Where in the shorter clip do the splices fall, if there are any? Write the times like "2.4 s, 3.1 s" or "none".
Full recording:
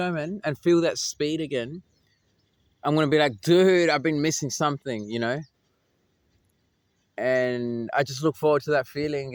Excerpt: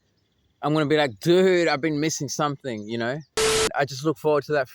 3.7 s